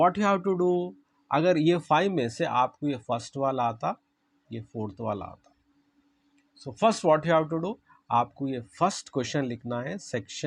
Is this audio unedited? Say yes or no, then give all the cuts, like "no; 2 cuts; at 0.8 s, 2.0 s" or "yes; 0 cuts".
yes; 0 cuts